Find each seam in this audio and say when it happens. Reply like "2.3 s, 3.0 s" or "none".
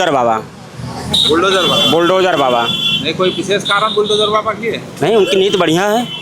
none